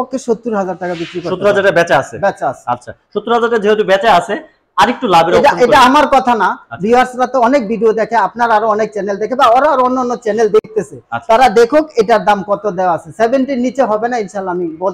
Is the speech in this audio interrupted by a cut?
no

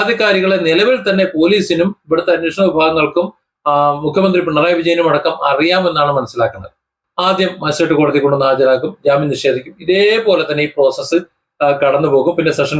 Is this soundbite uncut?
no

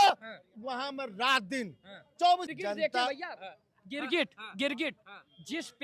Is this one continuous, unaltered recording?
no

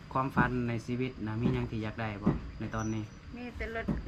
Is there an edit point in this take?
no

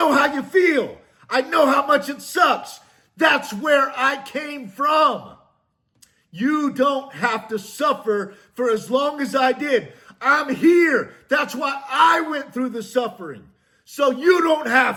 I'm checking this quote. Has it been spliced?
no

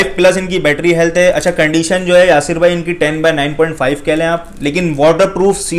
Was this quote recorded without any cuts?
yes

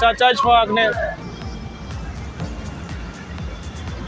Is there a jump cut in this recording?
yes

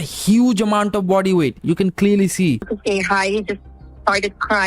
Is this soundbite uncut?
no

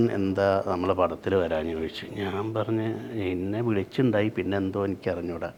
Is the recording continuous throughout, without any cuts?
yes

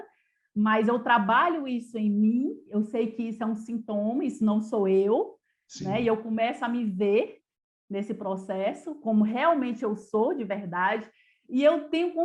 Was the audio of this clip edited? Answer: no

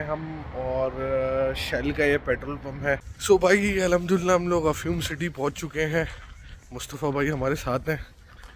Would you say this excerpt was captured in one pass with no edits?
no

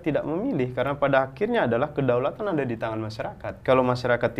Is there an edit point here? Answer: yes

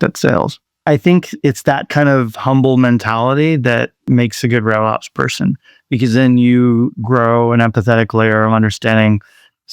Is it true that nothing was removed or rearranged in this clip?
no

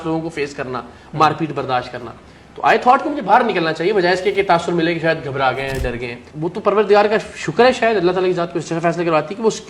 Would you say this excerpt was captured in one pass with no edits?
yes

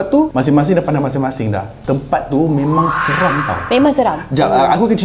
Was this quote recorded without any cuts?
yes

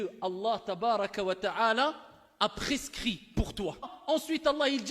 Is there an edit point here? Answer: yes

